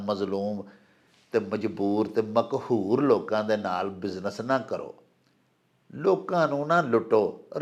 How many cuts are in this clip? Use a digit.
0